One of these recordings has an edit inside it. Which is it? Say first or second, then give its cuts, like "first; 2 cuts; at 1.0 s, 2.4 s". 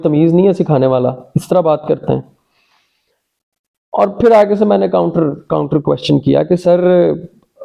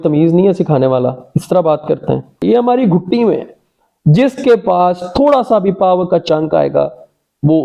second; 1 cut; at 2.4 s